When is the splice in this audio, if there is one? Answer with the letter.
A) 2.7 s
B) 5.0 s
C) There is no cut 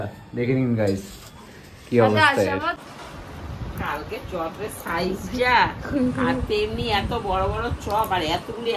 A